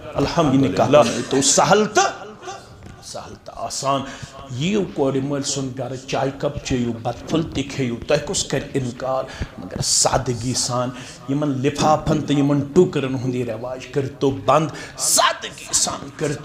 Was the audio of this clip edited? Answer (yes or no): yes